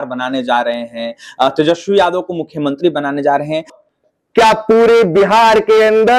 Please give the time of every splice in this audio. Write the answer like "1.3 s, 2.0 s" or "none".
3.7 s